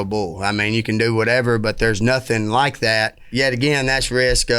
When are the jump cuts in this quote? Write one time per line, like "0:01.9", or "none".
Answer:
0:03.2

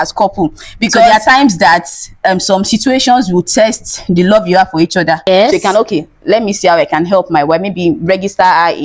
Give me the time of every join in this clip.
0:01.1
0:05.3

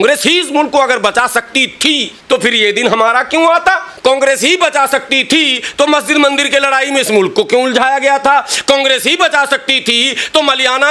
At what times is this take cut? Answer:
0:02.1
0:03.9

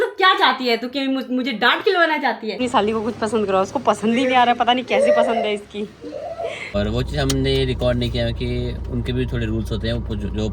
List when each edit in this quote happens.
0:02.6
0:06.8

